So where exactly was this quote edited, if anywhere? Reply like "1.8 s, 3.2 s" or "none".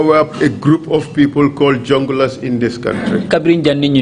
none

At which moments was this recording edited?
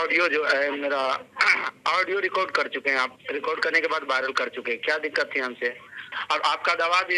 6.1 s

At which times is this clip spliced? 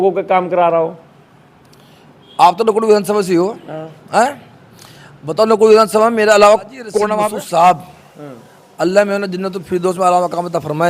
7.2 s

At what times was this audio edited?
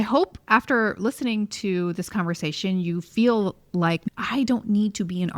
4.0 s

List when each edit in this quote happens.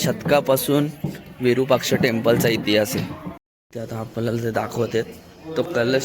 3.7 s

